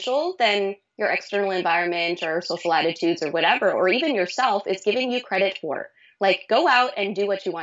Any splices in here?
no; 0 cuts

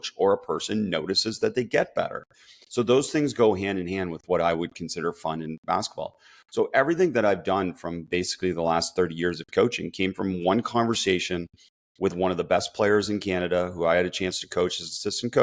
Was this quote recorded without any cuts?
yes; 0 cuts

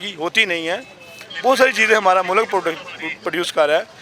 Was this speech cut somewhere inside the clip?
no; 0 cuts

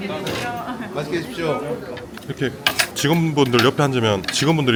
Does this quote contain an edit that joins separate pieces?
no; 0 cuts

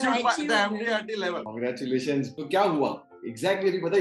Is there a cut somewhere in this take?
yes; 2 cuts; at 1.5 s, 2.3 s

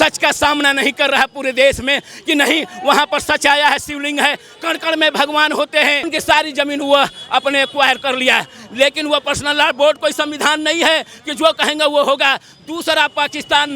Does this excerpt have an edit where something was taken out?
yes; 1 cut; at 6.0 s

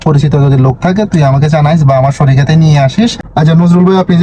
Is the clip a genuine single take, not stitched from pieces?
no; 1 cut; at 3.2 s

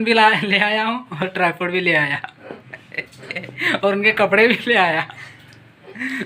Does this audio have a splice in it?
no; 0 cuts

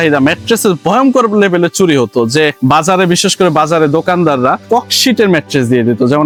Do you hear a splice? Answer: no; 0 cuts

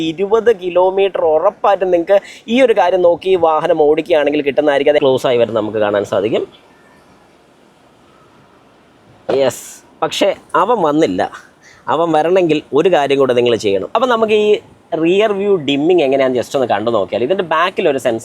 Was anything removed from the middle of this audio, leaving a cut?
yes; 2 cuts; at 5.0 s, 13.9 s

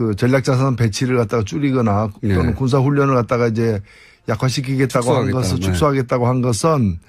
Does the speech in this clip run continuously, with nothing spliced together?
no; 1 cut; at 4.8 s

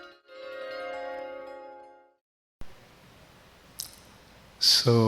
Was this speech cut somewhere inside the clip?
yes; 1 cut; at 2.6 s

